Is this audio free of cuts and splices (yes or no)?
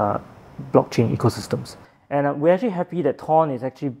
no